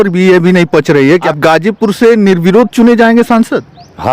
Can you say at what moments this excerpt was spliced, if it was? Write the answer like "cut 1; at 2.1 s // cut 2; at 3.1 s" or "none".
cut 1; at 1.3 s